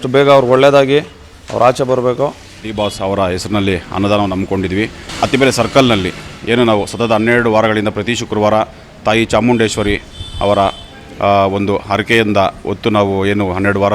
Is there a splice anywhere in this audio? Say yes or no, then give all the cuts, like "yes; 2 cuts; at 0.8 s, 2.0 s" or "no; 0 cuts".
yes; 2 cuts; at 2.4 s, 5.0 s